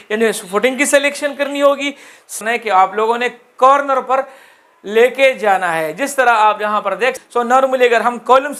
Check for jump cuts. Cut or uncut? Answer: cut